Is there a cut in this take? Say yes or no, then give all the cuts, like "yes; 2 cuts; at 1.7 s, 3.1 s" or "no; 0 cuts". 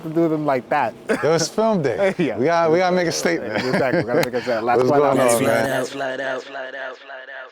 no; 0 cuts